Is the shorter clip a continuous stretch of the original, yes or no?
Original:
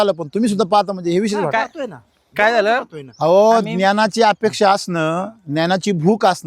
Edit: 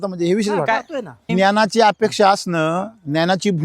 no